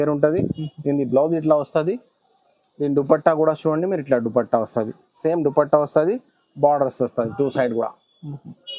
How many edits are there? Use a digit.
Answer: 0